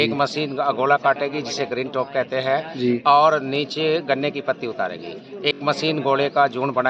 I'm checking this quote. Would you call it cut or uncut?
uncut